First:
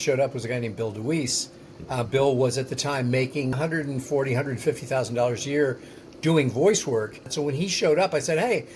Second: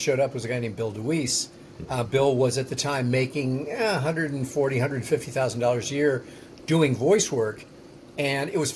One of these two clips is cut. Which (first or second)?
first